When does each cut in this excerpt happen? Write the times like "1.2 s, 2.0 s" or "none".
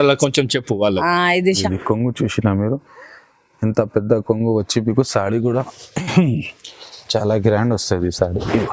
1.5 s